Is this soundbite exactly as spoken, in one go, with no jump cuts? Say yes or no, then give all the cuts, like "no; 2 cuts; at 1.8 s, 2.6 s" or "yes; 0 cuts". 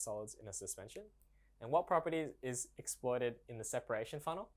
no; 1 cut; at 1.2 s